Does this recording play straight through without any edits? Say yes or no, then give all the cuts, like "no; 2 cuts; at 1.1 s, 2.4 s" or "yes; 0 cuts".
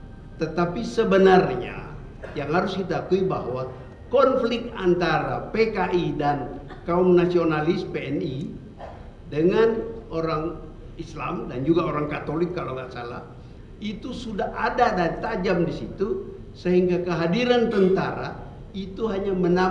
yes; 0 cuts